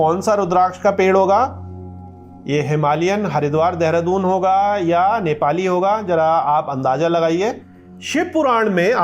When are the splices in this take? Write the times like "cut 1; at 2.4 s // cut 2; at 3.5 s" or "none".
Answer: cut 1; at 8.0 s